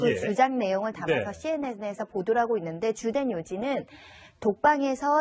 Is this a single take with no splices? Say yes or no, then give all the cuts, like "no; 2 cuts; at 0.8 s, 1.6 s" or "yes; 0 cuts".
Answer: no; 1 cut; at 3.5 s